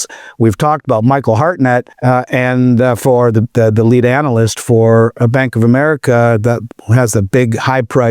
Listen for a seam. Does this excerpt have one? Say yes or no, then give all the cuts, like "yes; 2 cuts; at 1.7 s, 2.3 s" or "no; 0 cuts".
yes; 1 cut; at 1.9 s